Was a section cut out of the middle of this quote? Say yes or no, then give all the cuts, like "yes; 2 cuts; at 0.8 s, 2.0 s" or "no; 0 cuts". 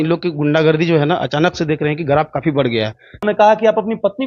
yes; 1 cut; at 3.2 s